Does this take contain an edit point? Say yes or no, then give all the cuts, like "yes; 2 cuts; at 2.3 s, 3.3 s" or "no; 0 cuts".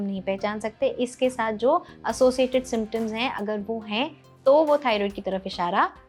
no; 0 cuts